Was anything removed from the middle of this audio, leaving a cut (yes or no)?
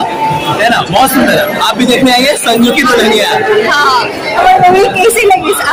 no